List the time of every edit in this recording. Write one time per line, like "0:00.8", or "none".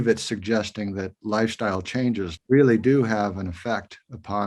0:02.3